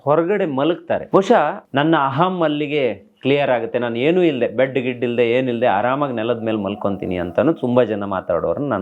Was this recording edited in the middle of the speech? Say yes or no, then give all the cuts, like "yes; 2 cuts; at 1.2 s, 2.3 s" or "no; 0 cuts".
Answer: yes; 2 cuts; at 1.0 s, 1.6 s